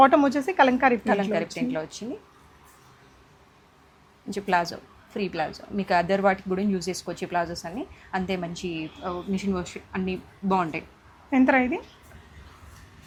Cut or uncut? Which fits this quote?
uncut